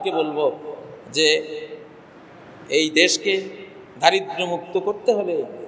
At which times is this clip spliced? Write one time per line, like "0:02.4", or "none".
none